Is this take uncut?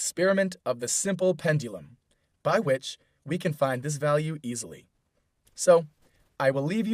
yes; 0 cuts

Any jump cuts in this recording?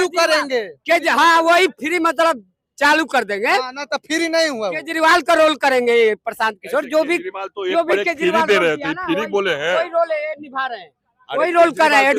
no; 0 cuts

